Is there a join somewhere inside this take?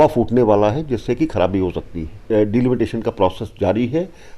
yes; 1 cut; at 2.3 s

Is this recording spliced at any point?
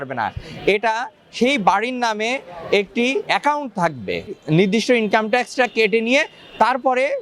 yes; 1 cut; at 4.3 s

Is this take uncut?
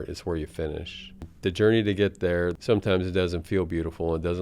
no; 2 cuts; at 1.3 s, 2.5 s

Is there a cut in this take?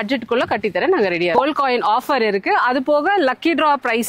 yes; 1 cut; at 1.3 s

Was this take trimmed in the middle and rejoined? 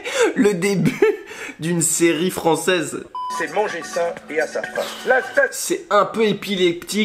yes; 1 cut; at 3.2 s

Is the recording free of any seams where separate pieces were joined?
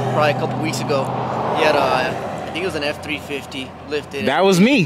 yes; 0 cuts

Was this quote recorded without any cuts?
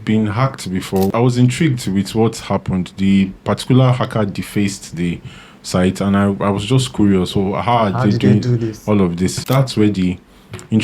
no; 2 cuts; at 1.1 s, 9.4 s

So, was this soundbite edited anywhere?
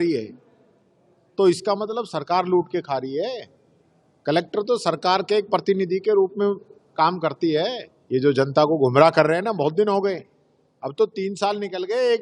yes; 1 cut; at 7.9 s

